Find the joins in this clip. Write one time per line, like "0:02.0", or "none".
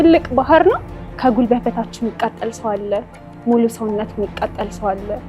0:01.0

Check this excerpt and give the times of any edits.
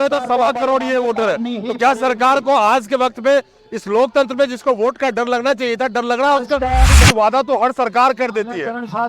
0:06.9

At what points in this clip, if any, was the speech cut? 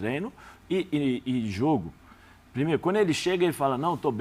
none

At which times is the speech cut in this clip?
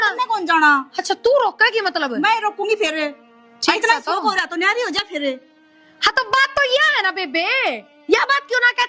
none

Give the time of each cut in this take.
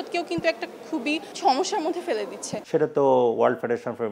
0:02.5

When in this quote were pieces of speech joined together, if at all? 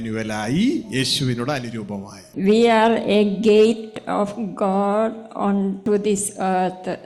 0:02.3
0:05.8

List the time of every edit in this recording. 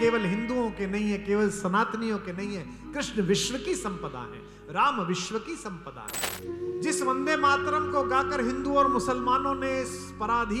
0:06.3

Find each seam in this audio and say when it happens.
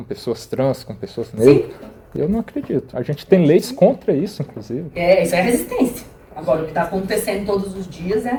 none

